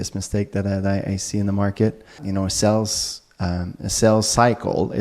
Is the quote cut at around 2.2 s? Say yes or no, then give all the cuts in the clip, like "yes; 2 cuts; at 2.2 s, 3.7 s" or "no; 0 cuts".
yes; 1 cut; at 2.2 s